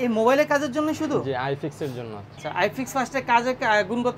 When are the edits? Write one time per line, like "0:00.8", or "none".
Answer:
0:02.4